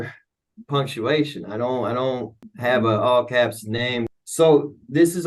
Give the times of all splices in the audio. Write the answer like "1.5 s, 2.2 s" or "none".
2.4 s, 4.1 s